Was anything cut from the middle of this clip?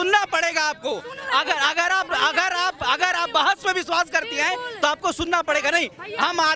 no; 0 cuts

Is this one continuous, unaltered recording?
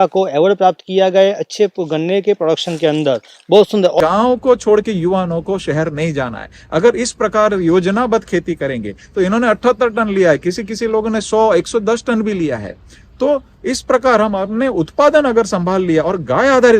no; 1 cut; at 4.0 s

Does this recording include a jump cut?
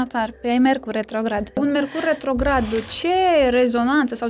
yes; 1 cut; at 1.6 s

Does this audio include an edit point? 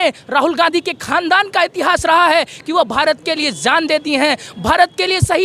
no; 0 cuts

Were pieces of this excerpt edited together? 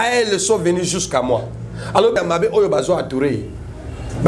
yes; 1 cut; at 2.2 s

